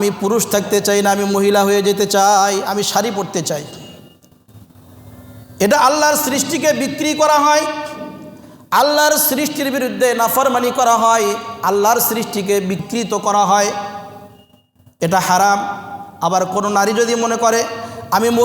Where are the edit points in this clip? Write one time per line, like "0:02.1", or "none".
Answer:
0:12.8